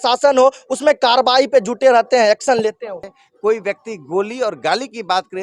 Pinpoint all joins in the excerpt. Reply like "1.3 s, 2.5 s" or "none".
3.2 s